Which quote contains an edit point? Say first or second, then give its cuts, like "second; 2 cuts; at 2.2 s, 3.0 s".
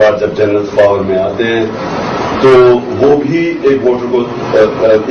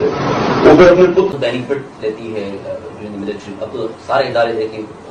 second; 1 cut; at 1.3 s